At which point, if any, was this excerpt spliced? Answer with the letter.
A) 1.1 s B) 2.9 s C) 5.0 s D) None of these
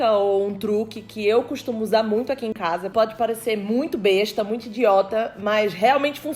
B